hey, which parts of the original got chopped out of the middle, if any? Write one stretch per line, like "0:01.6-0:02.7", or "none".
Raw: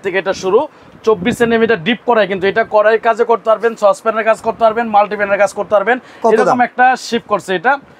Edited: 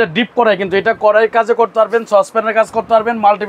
none

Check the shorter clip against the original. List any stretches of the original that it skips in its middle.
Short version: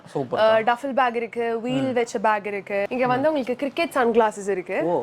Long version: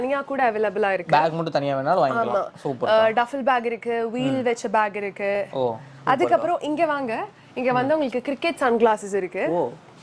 0:05.4-0:07.5

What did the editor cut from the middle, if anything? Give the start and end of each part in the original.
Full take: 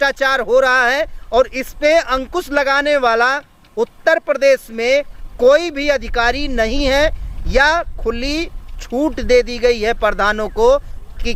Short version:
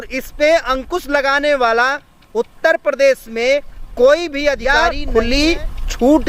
0:06.3-0:07.8

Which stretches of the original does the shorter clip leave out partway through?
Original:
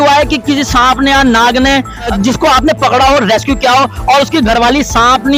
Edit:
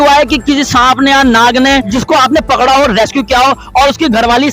0:01.9-0:02.2

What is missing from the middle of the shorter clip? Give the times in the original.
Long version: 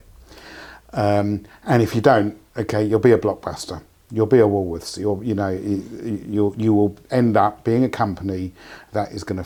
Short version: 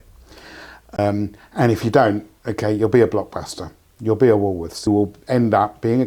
0:01.0-0:01.1
0:05.0-0:06.7

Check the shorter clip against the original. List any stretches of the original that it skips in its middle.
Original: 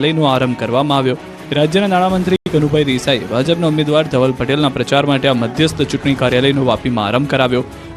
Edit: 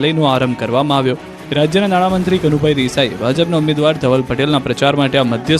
0:02.4-0:02.5

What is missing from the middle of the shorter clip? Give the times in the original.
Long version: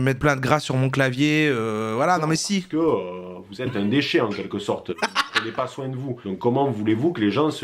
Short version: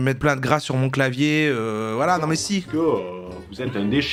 none

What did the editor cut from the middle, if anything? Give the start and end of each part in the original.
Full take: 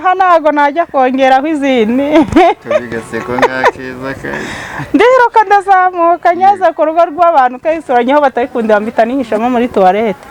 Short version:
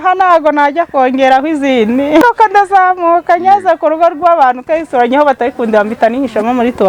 0:02.2-0:05.2

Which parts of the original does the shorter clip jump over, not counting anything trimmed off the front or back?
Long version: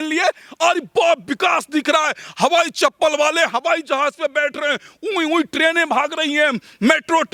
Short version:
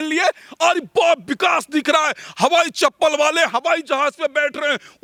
none

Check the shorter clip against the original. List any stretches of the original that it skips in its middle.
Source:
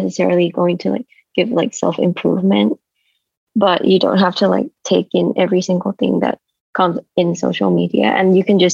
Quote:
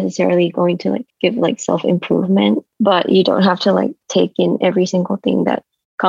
0:01.1-0:01.2
0:02.8-0:03.4

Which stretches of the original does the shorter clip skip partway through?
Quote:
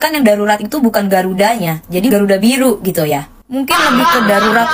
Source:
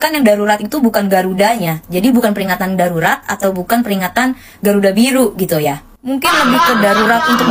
0:02.1-0:04.6

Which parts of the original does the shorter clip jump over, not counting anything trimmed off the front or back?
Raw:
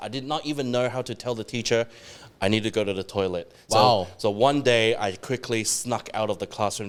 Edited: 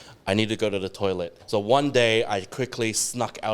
0:03.5-0:04.1

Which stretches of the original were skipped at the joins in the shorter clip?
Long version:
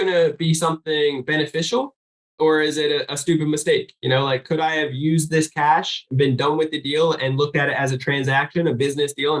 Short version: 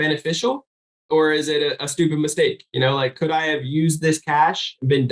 none

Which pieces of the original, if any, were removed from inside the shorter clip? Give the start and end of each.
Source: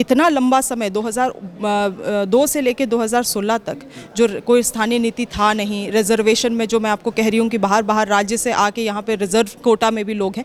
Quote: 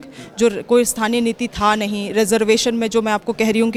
none

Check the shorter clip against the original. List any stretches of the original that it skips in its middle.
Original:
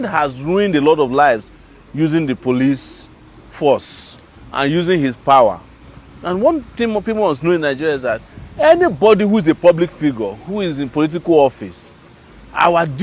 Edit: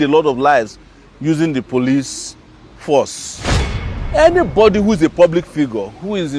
0:04.5-0:08.2

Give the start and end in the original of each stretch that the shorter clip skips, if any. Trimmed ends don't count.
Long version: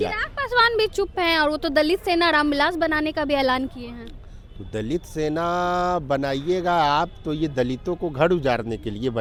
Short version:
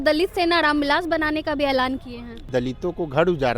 0:04.2-0:07.5

